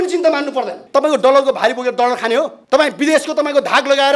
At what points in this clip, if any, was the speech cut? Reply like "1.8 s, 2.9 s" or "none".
0.8 s, 2.6 s